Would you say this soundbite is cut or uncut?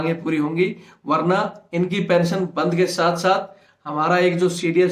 uncut